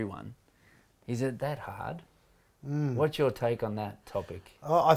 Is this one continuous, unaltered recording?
yes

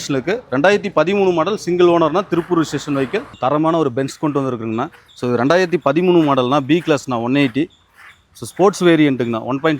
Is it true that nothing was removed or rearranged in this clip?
no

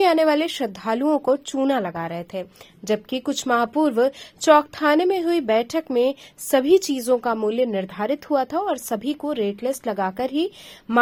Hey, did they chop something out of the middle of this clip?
no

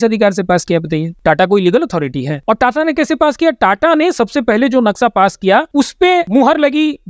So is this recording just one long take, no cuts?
no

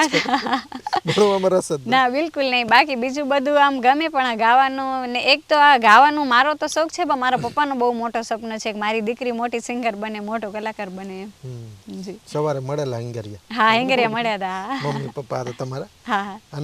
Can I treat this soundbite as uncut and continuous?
yes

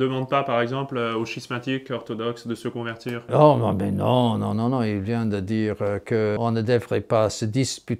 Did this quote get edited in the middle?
yes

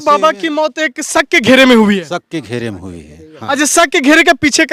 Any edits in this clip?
no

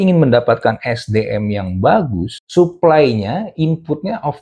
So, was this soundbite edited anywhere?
yes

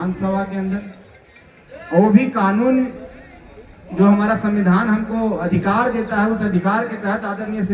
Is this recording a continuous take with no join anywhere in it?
yes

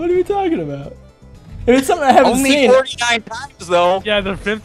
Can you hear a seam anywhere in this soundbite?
yes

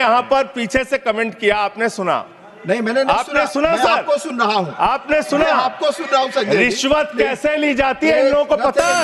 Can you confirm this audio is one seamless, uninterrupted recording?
yes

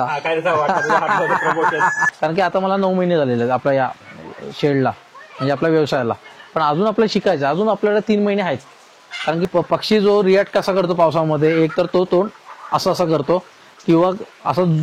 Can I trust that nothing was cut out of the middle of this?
no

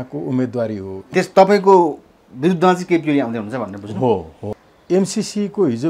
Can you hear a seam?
yes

